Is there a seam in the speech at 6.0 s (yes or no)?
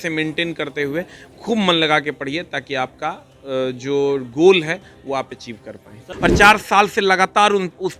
yes